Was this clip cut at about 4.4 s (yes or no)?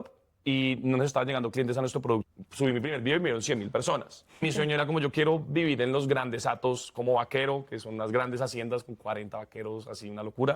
yes